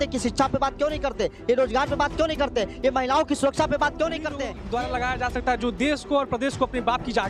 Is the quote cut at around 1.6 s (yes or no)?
no